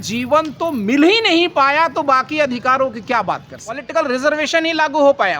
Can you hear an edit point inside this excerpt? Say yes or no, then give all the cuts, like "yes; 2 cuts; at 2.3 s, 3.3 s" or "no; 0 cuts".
yes; 1 cut; at 3.6 s